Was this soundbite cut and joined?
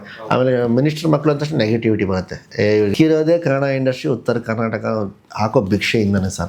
yes; 1 cut; at 2.9 s

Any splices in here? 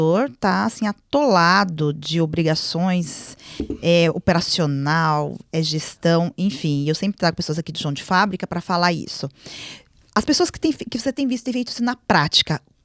no; 0 cuts

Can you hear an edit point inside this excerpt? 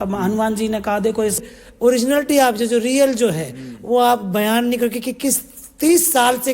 yes; 1 cut; at 1.5 s

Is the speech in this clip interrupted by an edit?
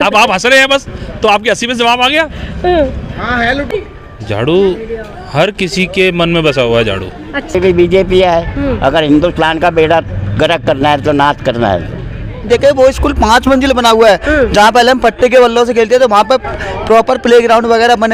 yes; 3 cuts; at 3.7 s, 7.5 s, 12.5 s

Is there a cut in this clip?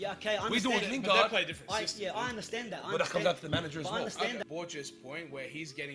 yes; 1 cut; at 4.4 s

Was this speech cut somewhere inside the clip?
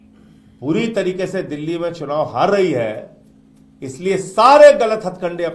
no; 0 cuts

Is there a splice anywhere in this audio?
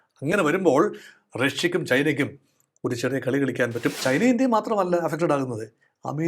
yes; 1 cut; at 4.0 s

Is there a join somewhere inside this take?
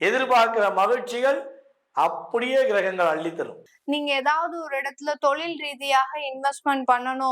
yes; 1 cut; at 3.7 s

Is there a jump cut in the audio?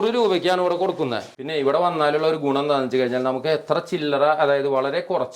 yes; 1 cut; at 1.4 s

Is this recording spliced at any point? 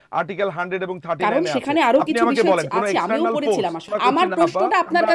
yes; 1 cut; at 3.8 s

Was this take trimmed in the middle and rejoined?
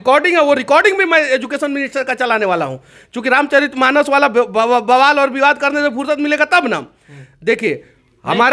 no; 0 cuts

